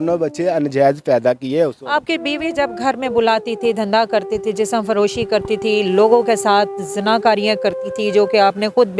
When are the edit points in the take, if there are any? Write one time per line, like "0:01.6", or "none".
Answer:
none